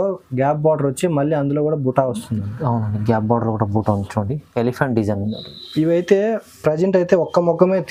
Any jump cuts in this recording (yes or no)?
no